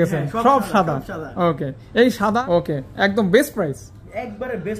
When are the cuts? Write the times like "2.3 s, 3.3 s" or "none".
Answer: 2.4 s